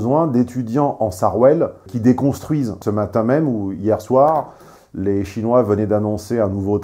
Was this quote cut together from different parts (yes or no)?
yes